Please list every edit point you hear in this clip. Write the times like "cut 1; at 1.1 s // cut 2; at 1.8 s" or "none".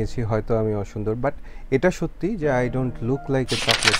none